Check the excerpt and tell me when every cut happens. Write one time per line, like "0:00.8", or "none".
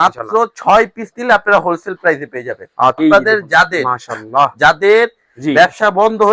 0:03.0